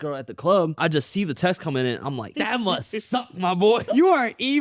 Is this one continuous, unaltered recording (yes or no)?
no